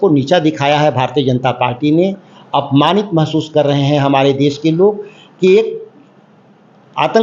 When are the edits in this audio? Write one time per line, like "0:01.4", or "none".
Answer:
none